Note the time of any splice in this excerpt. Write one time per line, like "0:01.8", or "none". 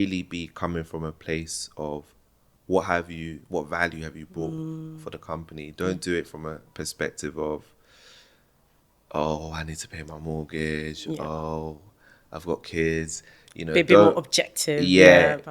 none

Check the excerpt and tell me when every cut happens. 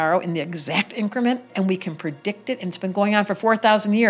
0:01.5

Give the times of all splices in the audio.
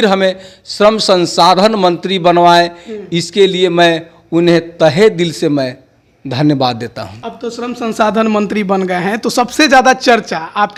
none

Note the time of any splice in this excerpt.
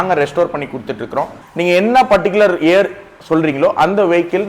0:01.4

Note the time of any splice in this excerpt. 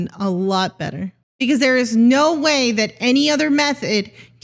0:01.2

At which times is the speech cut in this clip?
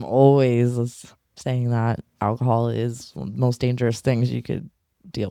none

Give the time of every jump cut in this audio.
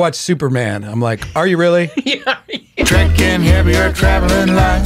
0:02.8

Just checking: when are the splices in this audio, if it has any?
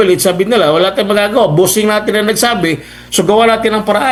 none

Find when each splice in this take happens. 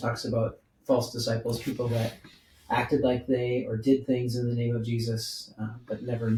none

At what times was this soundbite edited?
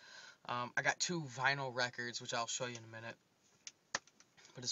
0:01.3

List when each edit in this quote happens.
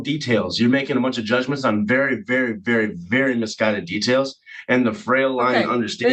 none

